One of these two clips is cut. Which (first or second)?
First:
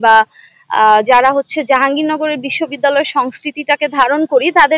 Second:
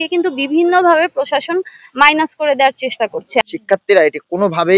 second